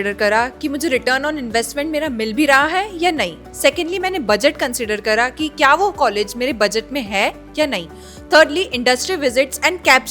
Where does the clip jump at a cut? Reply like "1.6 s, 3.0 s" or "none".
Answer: none

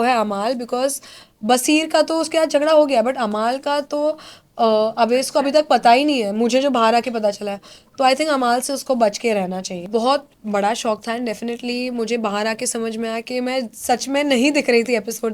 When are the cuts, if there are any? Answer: 9.8 s

